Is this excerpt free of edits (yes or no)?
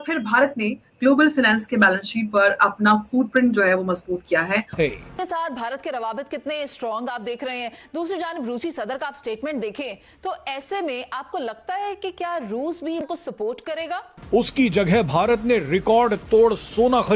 yes